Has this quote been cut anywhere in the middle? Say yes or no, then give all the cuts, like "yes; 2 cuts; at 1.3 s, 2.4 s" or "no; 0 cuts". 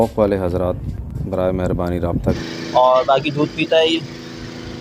yes; 1 cut; at 2.3 s